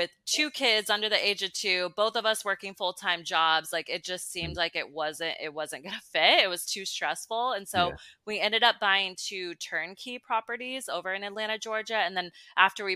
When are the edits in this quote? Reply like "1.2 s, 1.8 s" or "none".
none